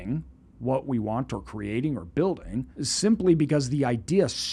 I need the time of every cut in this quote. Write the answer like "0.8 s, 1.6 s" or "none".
2.8 s